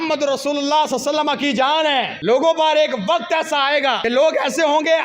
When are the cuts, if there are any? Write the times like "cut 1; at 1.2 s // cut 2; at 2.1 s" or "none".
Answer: cut 1; at 2.1 s // cut 2; at 4.0 s